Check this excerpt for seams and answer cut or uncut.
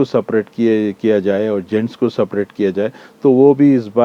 uncut